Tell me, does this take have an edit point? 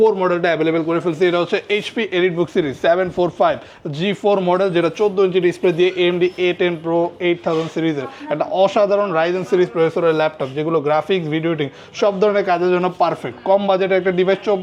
no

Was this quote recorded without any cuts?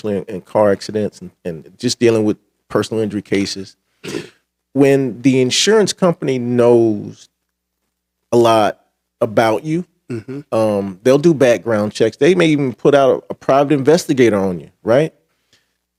yes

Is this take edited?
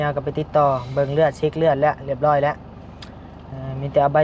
no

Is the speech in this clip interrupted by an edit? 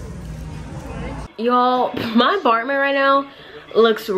yes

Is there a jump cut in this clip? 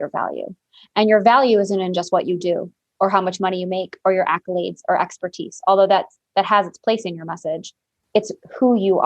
yes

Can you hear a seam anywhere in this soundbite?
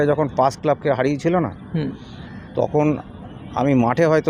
no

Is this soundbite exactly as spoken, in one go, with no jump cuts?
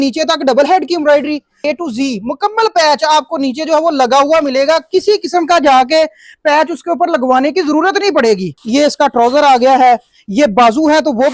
no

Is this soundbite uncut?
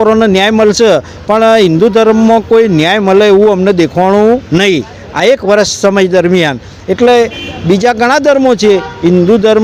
yes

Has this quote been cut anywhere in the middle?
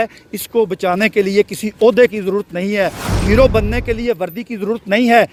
no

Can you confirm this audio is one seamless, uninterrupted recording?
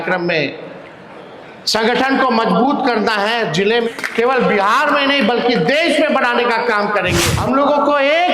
no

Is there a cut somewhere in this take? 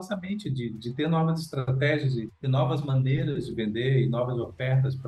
no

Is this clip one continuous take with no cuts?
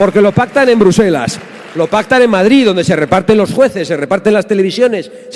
yes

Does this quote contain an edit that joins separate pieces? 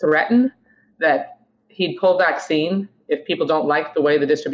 no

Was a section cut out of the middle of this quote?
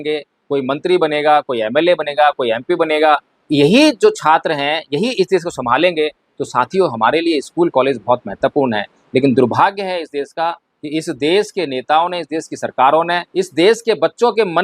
yes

